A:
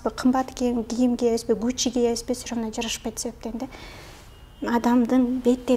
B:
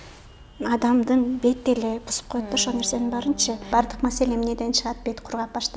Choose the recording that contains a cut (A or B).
B